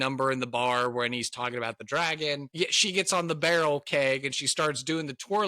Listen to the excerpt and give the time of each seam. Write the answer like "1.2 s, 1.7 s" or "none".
2.5 s